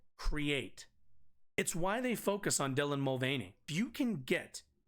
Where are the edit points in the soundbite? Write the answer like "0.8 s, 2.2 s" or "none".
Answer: 1.6 s, 3.7 s